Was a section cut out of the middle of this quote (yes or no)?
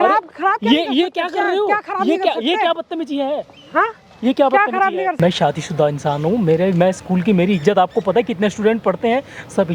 no